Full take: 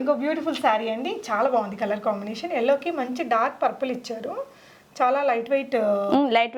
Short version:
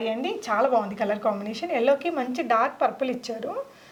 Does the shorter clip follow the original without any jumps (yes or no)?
yes